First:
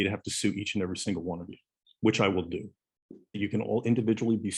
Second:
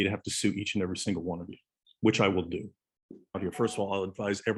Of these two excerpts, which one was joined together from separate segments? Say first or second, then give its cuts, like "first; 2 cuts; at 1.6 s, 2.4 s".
first; 1 cut; at 3.4 s